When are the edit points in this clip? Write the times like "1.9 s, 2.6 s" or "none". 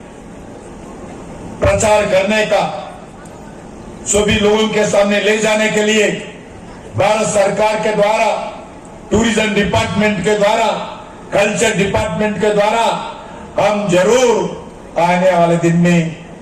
none